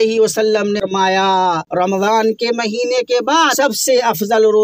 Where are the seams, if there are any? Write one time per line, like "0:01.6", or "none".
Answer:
0:01.6
0:03.5